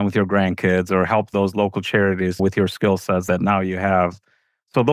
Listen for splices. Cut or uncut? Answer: cut